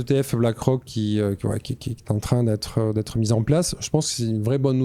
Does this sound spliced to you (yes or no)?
no